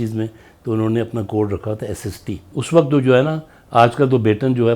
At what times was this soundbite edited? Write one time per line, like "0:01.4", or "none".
0:02.6